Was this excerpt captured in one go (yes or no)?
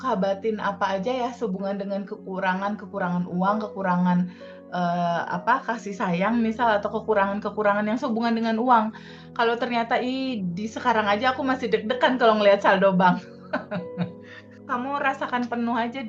no